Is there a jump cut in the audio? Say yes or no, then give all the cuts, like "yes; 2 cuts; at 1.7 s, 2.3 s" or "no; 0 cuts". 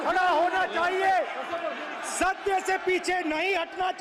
no; 0 cuts